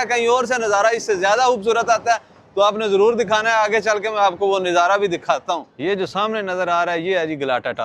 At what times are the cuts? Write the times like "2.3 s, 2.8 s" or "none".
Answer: 5.7 s